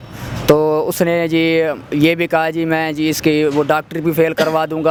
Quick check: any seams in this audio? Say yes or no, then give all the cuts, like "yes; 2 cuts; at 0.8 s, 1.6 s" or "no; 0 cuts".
no; 0 cuts